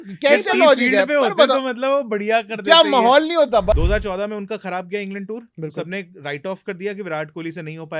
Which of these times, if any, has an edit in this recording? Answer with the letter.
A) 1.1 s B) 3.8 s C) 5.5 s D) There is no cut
B